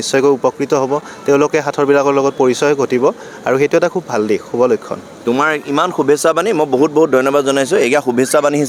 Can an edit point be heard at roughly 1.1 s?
no; 0 cuts

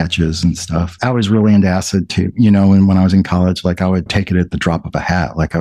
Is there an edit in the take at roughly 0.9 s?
yes; 1 cut; at 0.9 s

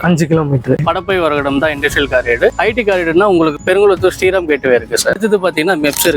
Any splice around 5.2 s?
yes; 2 cuts; at 0.8 s, 5.2 s

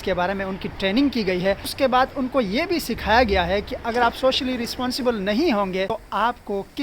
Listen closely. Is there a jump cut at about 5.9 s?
yes; 2 cuts; at 1.7 s, 5.9 s

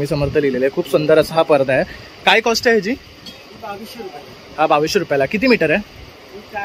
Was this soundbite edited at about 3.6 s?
no; 0 cuts

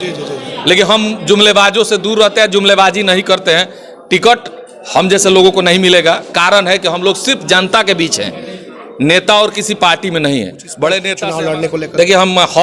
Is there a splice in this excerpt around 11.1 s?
yes; 1 cut; at 11.1 s

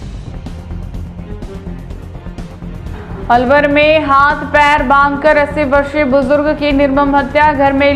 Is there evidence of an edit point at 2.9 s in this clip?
yes; 1 cut; at 2.9 s

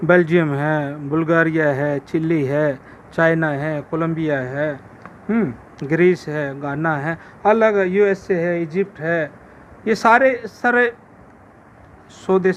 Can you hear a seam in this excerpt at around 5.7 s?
no; 0 cuts

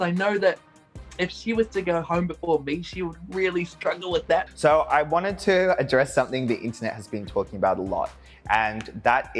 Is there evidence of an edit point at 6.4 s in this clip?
no; 1 cut; at 4.5 s

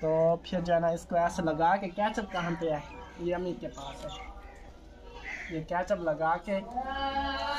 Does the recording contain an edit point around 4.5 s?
no; 0 cuts

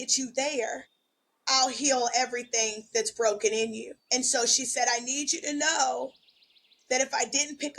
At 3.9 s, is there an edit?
yes; 1 cut; at 3.9 s

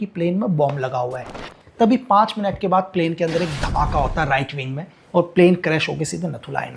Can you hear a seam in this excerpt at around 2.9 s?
no; 1 cut; at 1.4 s

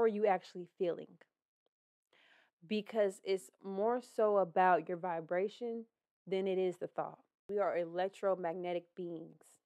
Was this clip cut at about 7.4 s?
yes; 1 cut; at 7.4 s

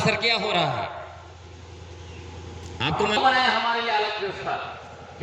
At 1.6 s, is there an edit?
no; 1 cut; at 3.2 s

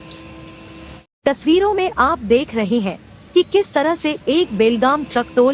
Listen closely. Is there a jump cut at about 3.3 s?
no; 1 cut; at 1.0 s

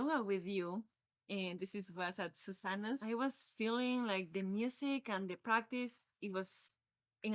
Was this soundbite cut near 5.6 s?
no; 1 cut; at 3.0 s

